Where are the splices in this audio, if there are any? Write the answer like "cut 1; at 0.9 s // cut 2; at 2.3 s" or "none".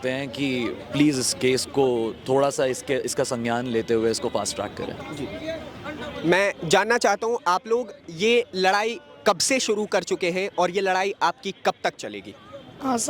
none